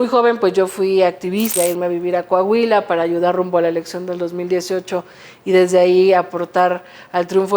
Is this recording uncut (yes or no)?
no